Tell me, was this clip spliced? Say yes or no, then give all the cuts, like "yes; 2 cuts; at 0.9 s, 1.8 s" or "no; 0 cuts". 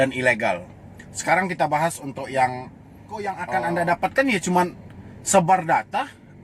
yes; 1 cut; at 3.2 s